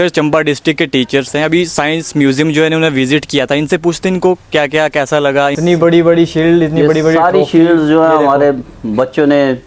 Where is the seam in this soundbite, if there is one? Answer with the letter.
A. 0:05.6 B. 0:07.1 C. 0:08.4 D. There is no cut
A